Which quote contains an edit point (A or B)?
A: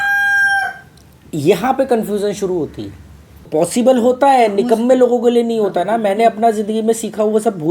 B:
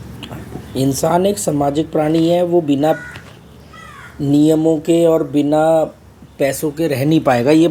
A